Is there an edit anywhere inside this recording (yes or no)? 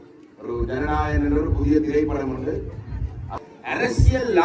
yes